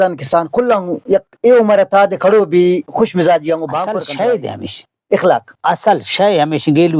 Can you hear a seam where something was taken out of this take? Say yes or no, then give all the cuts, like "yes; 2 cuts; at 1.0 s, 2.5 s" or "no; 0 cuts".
yes; 1 cut; at 3.9 s